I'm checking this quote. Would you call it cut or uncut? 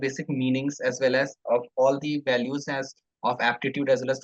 uncut